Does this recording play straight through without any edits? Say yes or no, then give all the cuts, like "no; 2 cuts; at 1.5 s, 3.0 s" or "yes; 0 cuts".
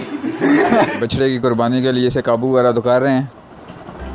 no; 1 cut; at 1.0 s